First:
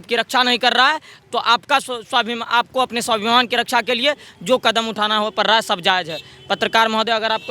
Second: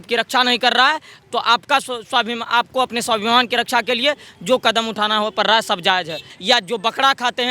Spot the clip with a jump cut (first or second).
second